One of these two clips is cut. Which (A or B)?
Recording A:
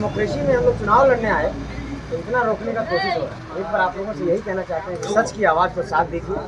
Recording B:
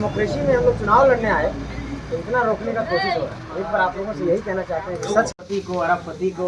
B